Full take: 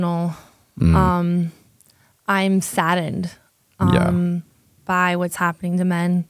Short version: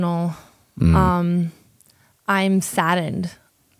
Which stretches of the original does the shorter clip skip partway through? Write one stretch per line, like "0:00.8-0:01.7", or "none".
none